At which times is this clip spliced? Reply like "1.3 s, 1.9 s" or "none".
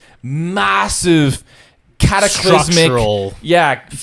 none

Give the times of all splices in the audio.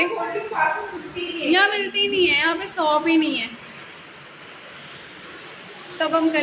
none

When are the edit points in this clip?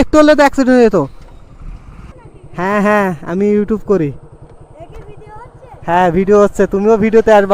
2.1 s

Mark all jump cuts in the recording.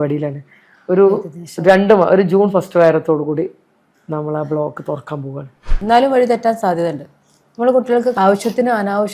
5.7 s

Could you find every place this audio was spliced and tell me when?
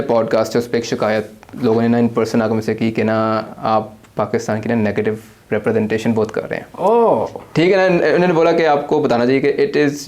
none

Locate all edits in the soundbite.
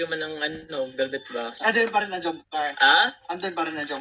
1.5 s

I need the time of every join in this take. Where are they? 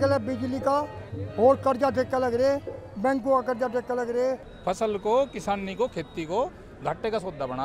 4.5 s

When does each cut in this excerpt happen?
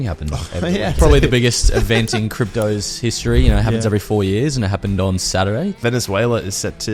1.0 s, 5.8 s

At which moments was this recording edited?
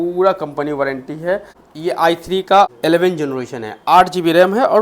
1.6 s, 2.7 s

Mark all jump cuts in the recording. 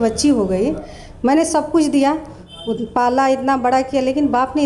none

